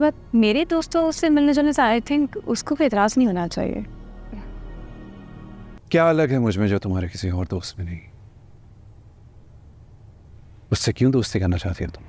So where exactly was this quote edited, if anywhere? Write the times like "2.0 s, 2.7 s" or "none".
5.8 s